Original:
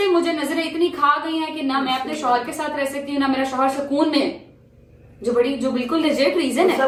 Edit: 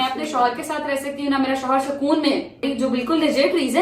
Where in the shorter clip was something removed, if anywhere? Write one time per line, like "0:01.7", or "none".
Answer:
0:02.6